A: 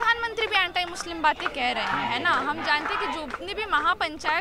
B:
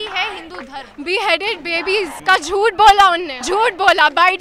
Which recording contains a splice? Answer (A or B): B